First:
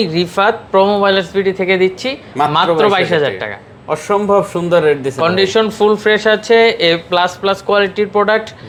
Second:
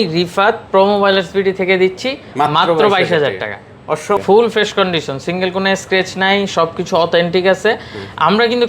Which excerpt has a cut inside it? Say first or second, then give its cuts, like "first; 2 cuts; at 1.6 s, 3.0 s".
second; 1 cut; at 4.2 s